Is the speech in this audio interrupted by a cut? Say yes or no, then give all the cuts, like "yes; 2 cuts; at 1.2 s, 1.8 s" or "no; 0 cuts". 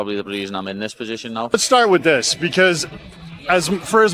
yes; 1 cut; at 1.5 s